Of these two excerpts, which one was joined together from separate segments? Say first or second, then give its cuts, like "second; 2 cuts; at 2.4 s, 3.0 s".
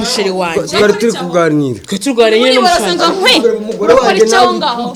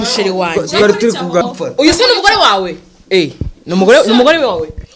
second; 1 cut; at 1.4 s